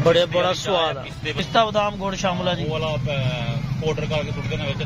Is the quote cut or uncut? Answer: cut